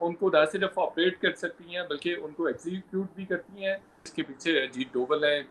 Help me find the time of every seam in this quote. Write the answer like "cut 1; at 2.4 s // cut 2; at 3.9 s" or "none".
cut 1; at 4.1 s